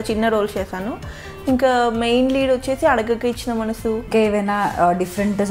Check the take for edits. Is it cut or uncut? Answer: cut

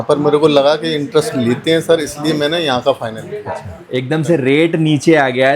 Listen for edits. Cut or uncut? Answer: cut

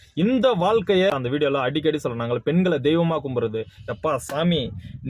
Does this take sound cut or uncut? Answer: cut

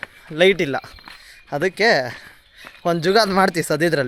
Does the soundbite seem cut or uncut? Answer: uncut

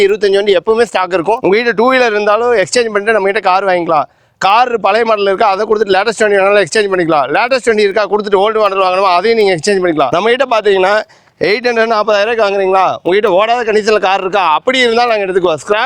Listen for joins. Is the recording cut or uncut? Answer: cut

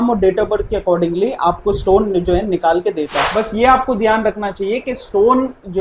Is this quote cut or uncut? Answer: cut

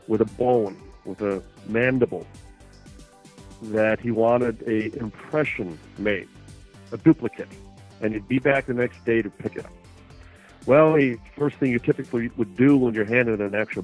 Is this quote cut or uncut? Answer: uncut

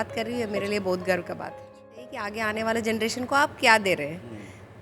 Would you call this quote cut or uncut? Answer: cut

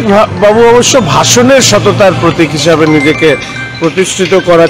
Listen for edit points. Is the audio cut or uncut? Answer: uncut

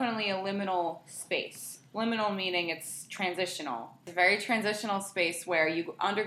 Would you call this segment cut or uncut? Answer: cut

